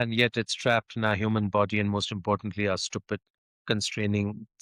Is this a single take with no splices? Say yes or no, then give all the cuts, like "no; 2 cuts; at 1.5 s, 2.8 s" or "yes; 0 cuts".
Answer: yes; 0 cuts